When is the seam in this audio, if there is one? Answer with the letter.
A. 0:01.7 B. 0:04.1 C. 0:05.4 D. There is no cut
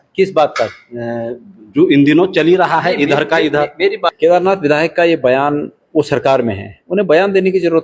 B